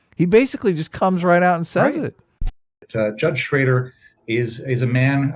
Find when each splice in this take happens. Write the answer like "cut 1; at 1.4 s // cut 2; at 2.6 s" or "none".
cut 1; at 2.7 s